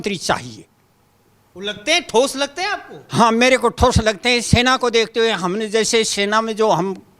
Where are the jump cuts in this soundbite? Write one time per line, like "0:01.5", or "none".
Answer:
none